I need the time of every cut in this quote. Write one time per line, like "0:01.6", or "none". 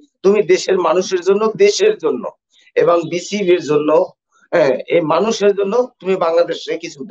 none